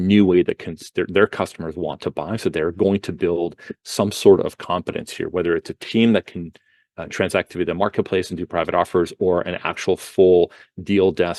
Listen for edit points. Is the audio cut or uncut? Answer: uncut